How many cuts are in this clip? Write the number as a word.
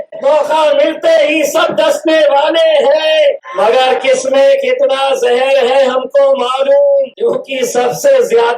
two